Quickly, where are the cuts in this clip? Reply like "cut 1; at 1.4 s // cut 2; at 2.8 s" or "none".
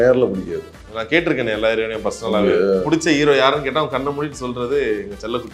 cut 1; at 2.9 s

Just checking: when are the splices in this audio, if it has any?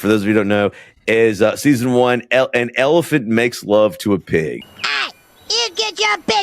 cut 1; at 4.7 s

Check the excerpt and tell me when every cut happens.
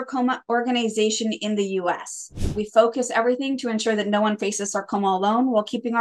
cut 1; at 2.6 s

